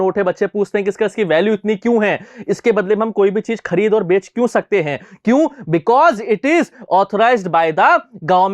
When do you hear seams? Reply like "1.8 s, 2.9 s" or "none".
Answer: none